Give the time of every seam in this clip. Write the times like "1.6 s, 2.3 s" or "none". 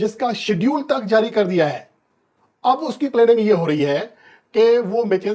none